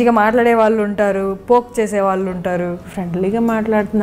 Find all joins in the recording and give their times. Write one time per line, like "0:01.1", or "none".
0:02.8